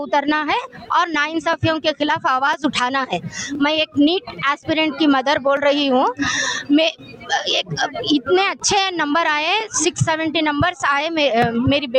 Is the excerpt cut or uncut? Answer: uncut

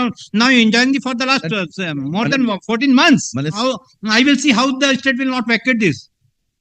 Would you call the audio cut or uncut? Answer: cut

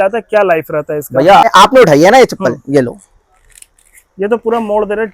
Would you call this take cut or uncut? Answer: cut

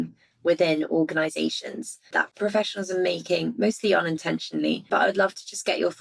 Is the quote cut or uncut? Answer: cut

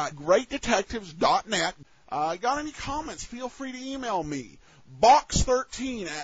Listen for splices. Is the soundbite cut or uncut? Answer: uncut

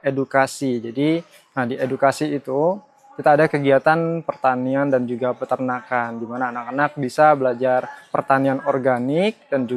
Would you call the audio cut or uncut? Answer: uncut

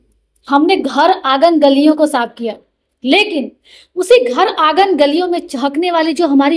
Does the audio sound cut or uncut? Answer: uncut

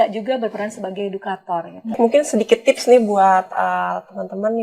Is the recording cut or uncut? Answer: cut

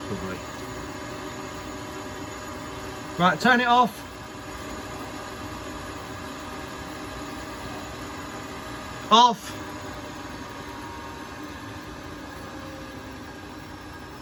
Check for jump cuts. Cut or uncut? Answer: uncut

